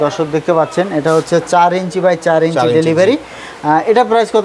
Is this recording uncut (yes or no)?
yes